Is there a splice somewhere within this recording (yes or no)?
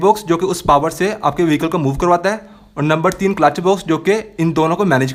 no